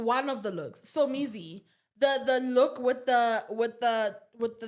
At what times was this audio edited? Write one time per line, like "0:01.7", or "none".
none